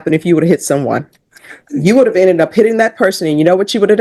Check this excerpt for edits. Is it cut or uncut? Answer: uncut